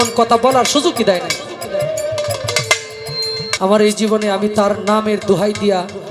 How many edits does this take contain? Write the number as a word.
one